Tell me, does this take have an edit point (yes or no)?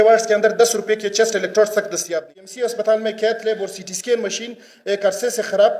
yes